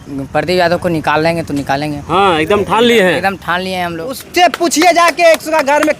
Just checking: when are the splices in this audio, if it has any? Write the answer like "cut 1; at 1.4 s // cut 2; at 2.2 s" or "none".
cut 1; at 4.2 s